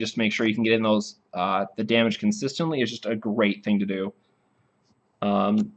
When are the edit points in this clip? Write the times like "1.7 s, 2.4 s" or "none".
none